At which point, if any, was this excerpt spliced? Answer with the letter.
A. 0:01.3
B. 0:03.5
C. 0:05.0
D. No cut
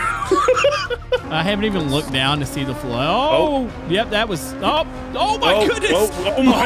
A